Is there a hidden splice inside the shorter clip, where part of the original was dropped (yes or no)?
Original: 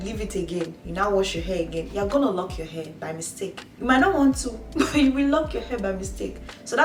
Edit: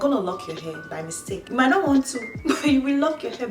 yes